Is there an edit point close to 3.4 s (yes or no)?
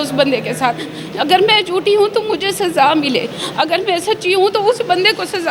no